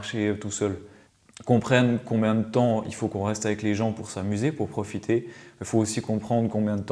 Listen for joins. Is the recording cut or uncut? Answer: cut